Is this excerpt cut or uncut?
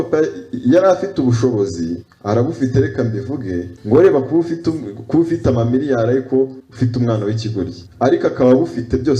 cut